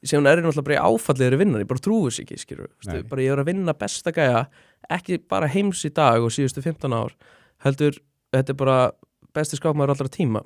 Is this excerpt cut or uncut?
uncut